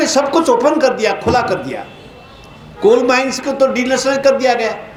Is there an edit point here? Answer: no; 0 cuts

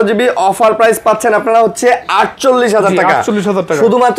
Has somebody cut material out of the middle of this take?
no; 0 cuts

